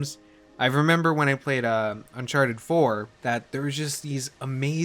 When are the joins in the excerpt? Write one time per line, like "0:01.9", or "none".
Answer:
0:03.1